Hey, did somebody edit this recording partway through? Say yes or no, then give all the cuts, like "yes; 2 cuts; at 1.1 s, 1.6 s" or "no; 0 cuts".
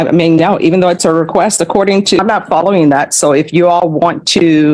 yes; 1 cut; at 2.2 s